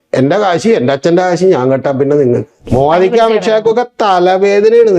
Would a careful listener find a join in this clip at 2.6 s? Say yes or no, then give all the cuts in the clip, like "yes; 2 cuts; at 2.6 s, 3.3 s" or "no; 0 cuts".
yes; 1 cut; at 2.6 s